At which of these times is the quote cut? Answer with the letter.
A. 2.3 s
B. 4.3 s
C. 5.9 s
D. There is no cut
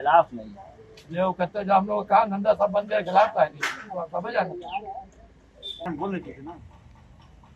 C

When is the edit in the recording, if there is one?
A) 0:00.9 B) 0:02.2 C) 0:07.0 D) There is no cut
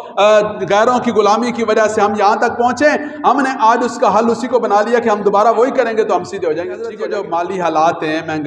C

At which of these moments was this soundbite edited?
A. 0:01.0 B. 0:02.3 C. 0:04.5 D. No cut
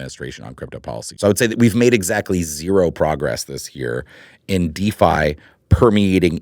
A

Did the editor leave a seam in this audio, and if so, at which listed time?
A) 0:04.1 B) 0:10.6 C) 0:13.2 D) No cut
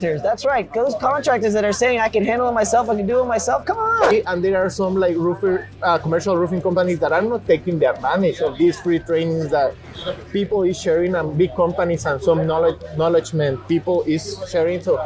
A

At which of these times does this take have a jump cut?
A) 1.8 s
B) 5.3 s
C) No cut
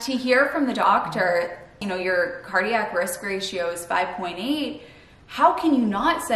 A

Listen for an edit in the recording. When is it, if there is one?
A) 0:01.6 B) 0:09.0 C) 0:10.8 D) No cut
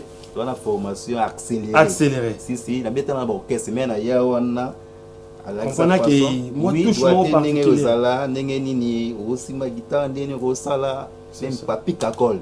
D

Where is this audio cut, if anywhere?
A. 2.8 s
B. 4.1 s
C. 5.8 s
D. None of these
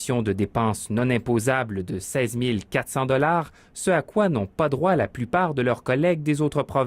B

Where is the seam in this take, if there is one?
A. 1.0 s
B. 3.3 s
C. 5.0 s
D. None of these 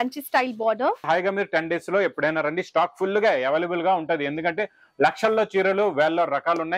A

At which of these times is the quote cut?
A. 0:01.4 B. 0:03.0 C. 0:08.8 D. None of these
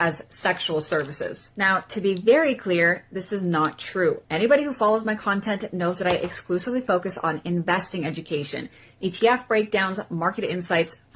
A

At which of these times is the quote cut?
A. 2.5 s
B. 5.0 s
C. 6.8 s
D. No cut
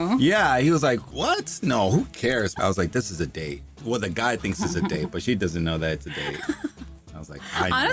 A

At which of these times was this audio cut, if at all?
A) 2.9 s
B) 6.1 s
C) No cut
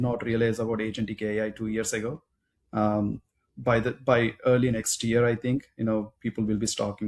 C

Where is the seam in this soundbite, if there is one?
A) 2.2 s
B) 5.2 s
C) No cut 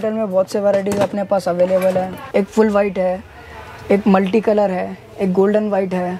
A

